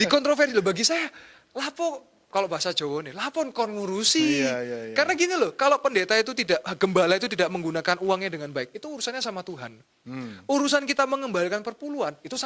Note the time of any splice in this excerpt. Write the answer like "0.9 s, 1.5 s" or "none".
none